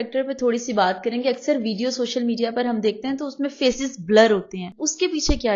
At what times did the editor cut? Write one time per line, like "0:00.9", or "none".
0:04.6